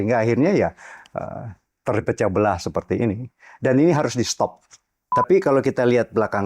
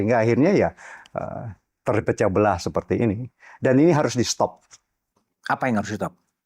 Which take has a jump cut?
first; 1 cut; at 5.2 s

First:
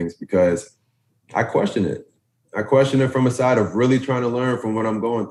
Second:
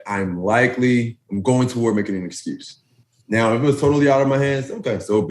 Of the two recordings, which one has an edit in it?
second; 2 cuts; at 1.2 s, 2.8 s

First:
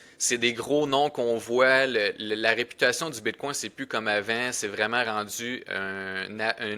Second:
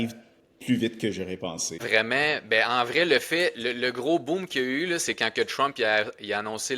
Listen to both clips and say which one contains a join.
second; 1 cut; at 1.8 s

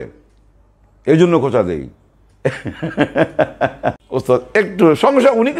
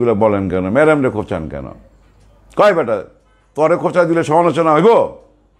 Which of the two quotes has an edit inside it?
first; 1 cut; at 4.0 s

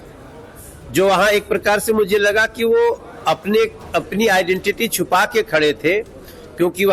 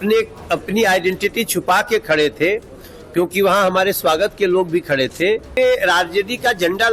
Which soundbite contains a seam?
second; 1 cut; at 5.5 s

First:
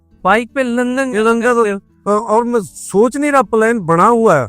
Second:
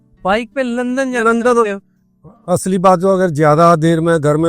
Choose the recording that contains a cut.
second; 1 cut; at 1.9 s

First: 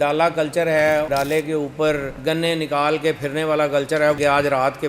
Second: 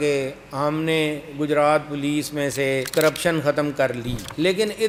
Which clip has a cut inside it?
first; 2 cuts; at 1.1 s, 4.2 s

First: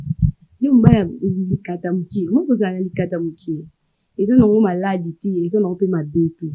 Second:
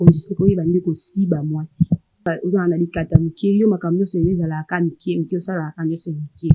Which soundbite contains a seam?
second; 1 cut; at 2.3 s

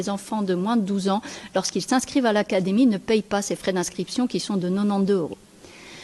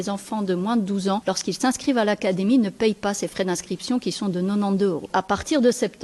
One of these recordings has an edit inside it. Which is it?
second; 2 cuts; at 1.2 s, 5.1 s

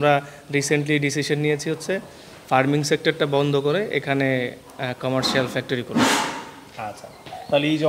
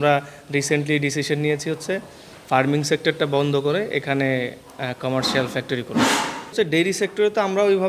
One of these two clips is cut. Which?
second; 1 cut; at 6.5 s

